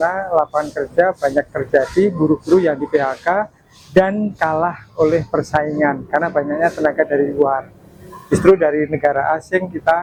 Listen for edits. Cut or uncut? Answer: uncut